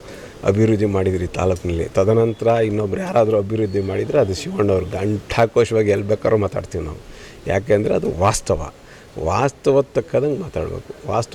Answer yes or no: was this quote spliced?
no